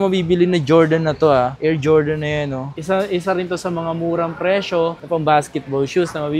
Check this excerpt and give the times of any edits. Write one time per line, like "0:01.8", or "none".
0:02.7

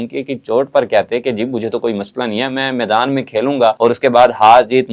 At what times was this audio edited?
0:03.8

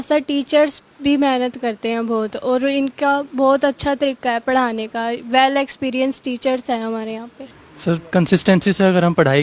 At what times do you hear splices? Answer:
0:07.3

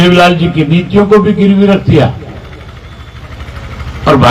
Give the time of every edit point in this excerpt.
none

